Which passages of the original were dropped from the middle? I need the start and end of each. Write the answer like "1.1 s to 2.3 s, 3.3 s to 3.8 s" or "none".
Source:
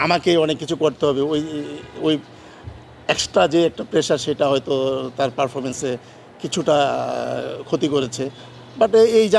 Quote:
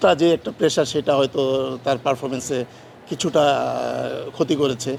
none